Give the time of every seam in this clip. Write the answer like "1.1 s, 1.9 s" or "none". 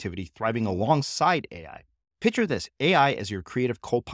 none